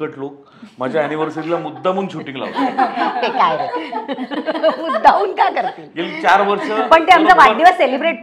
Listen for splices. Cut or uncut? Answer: uncut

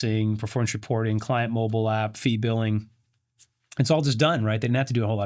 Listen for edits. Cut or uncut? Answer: uncut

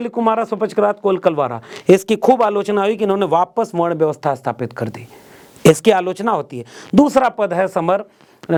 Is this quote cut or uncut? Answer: uncut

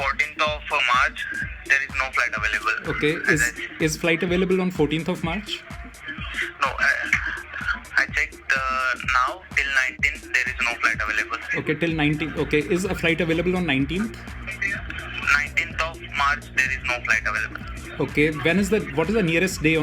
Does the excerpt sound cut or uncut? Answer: uncut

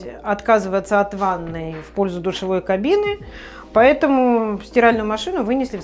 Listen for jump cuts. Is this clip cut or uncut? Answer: uncut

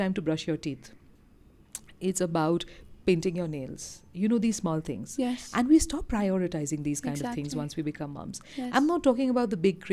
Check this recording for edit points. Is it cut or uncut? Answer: uncut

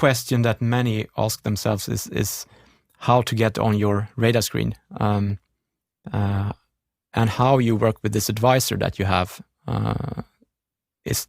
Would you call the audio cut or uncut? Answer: uncut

